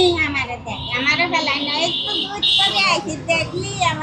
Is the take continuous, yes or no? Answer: yes